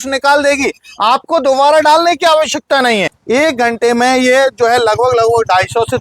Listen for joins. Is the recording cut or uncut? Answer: cut